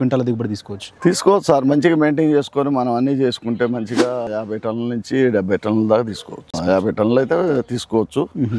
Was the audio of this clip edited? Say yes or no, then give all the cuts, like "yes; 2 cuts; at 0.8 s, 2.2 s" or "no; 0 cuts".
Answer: yes; 2 cuts; at 4.3 s, 6.5 s